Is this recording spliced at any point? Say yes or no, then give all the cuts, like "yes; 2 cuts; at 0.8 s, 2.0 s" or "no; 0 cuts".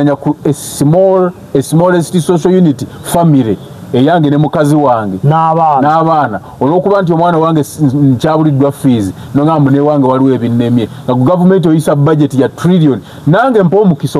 no; 0 cuts